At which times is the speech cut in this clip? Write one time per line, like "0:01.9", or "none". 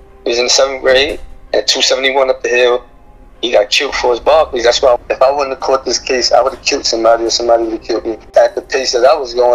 0:05.0
0:08.2